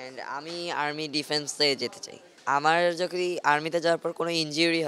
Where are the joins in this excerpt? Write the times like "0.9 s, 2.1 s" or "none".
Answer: 2.4 s

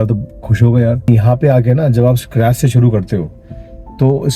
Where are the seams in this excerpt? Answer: 1.1 s

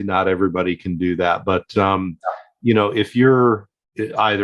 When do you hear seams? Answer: none

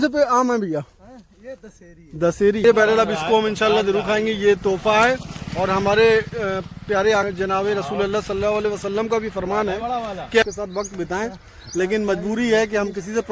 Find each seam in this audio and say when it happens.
2.6 s, 10.4 s

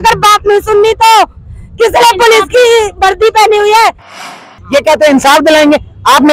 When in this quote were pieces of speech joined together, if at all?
4.4 s

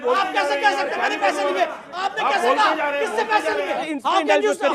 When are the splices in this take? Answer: 3.8 s

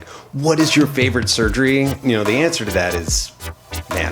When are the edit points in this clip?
2.0 s

